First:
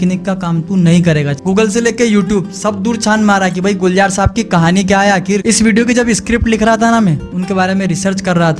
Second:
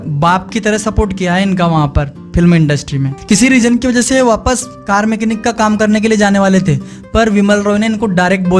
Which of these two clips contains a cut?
first; 2 cuts; at 1.3 s, 5.4 s

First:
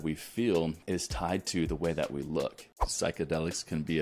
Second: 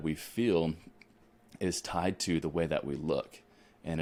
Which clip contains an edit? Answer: first; 2 cuts; at 0.8 s, 2.9 s

